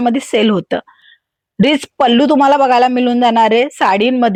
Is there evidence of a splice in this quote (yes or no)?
no